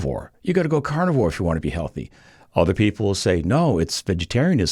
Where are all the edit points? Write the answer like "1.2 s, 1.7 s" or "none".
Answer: none

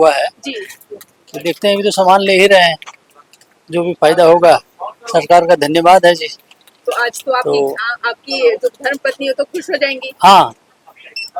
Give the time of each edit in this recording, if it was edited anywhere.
none

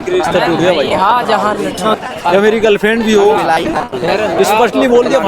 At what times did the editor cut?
2.0 s

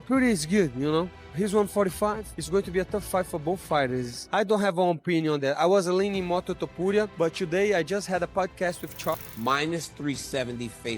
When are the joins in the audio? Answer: 9.1 s

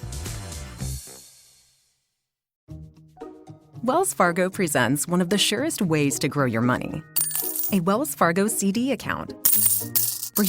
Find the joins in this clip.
2.5 s

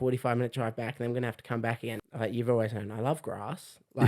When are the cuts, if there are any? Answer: 1.9 s

